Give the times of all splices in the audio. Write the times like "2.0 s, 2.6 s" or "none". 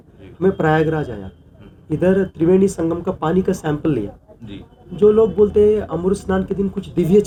none